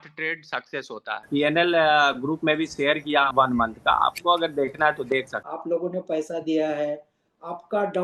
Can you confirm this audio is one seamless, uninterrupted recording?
no; 3 cuts; at 1.3 s, 3.3 s, 5.4 s

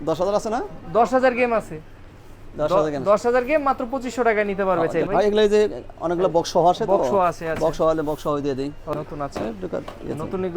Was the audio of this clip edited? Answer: yes; 2 cuts; at 5.1 s, 8.9 s

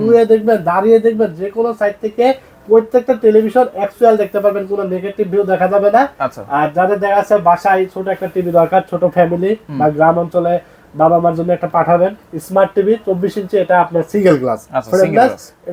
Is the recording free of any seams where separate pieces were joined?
yes; 0 cuts

